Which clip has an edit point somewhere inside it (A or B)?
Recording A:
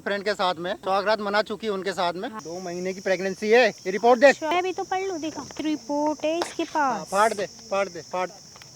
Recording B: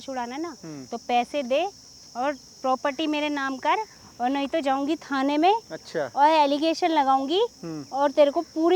A